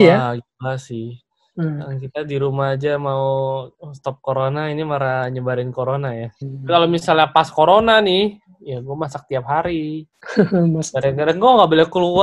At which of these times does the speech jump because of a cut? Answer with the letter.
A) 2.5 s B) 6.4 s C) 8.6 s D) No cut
B